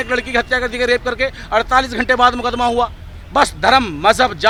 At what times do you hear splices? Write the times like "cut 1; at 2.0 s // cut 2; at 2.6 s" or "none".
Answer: none